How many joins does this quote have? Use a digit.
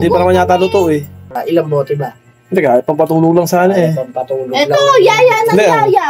1